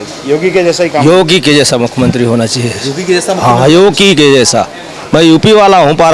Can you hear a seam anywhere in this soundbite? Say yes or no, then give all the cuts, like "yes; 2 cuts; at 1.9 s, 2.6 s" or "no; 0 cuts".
no; 0 cuts